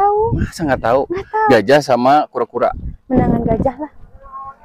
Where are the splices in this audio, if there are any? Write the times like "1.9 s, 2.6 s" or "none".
1.5 s